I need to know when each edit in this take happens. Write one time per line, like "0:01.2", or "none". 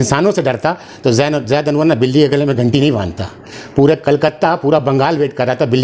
none